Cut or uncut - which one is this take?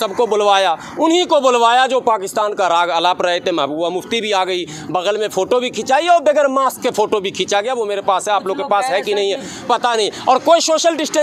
uncut